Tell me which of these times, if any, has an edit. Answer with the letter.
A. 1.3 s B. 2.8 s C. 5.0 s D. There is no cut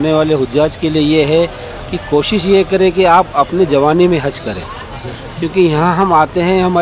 D